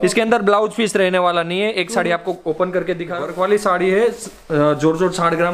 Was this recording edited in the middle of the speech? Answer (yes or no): yes